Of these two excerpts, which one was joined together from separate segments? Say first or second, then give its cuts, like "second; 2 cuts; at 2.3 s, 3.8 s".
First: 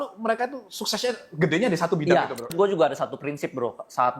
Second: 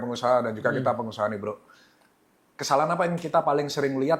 first; 1 cut; at 2.5 s